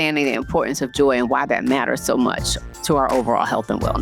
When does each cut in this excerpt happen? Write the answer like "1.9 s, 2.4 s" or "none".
none